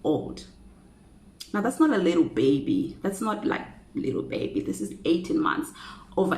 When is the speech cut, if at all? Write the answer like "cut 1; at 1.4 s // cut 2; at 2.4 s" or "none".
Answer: cut 1; at 4.9 s